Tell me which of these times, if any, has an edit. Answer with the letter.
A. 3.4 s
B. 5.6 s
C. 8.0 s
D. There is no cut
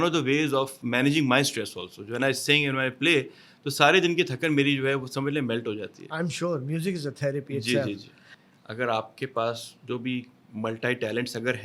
C